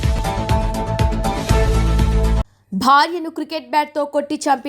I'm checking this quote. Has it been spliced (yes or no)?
yes